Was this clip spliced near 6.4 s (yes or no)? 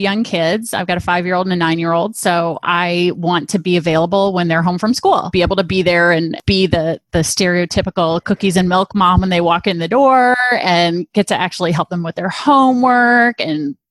yes